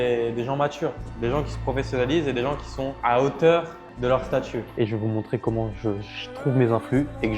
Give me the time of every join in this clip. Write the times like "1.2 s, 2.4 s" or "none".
4.7 s